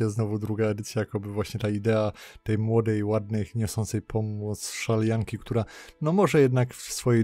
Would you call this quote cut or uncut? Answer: uncut